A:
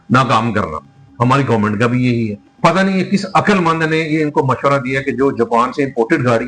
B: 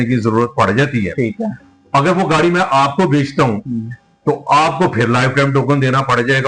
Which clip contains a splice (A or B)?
A